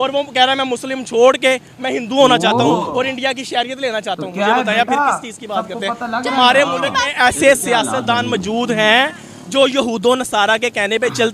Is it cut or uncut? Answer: uncut